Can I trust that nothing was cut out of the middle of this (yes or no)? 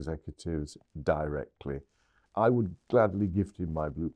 no